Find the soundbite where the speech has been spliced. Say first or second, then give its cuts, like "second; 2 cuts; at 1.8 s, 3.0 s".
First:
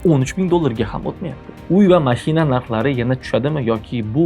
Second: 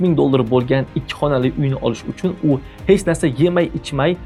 first; 1 cut; at 1.5 s